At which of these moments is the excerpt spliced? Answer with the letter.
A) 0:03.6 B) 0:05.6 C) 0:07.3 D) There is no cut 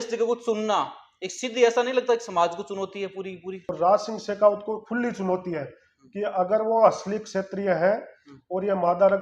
A